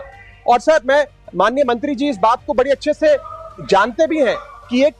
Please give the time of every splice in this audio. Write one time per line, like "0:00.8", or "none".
none

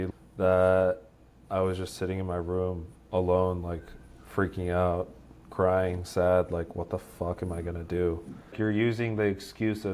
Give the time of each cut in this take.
0:08.4

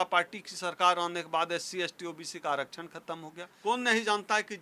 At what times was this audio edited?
0:03.5

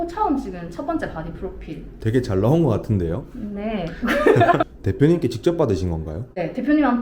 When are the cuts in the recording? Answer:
0:04.6

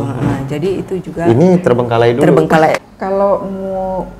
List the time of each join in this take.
0:02.7

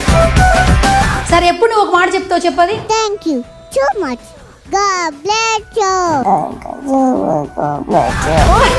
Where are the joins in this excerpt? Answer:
none

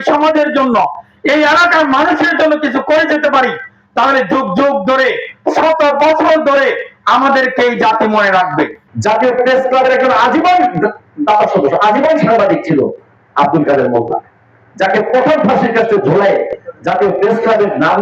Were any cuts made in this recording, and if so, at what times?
0:08.9

